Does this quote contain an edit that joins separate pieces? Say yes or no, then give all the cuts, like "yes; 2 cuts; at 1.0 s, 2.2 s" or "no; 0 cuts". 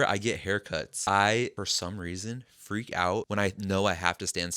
yes; 3 cuts; at 0.9 s, 1.5 s, 3.3 s